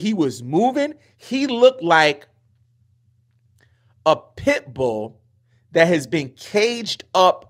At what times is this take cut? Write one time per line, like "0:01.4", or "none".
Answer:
none